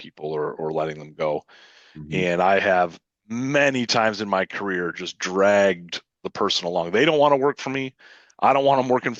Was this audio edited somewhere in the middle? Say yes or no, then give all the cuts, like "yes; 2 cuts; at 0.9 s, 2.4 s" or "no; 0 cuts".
no; 0 cuts